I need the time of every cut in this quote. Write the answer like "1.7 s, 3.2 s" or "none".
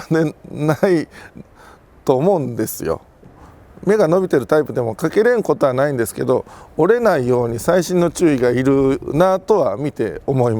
3.3 s